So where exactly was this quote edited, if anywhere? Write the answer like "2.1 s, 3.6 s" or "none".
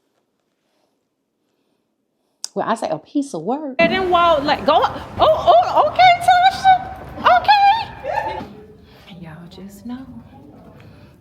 3.8 s, 8.4 s